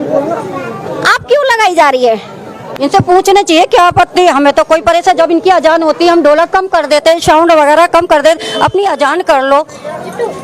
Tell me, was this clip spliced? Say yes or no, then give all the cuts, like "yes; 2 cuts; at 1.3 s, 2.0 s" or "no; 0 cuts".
yes; 1 cut; at 2.7 s